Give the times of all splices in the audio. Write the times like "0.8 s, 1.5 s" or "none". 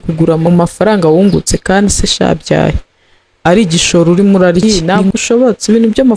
4.6 s